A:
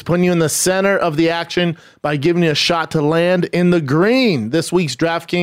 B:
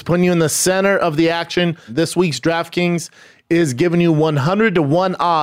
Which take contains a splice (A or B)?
B